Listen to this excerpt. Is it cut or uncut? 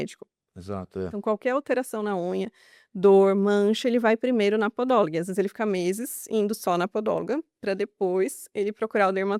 uncut